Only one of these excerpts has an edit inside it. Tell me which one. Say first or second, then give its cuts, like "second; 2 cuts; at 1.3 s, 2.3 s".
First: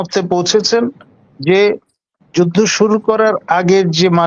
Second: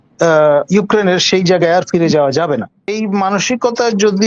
second; 1 cut; at 2.8 s